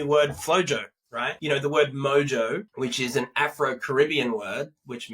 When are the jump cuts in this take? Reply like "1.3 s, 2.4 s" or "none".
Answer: 1.3 s, 2.7 s